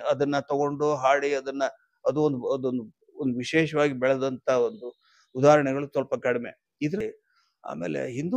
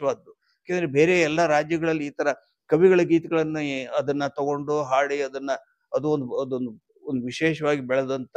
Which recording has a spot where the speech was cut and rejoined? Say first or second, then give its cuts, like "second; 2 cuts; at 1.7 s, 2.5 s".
first; 1 cut; at 7.0 s